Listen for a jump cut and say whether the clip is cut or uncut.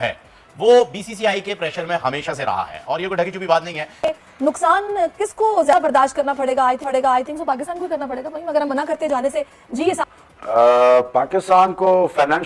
cut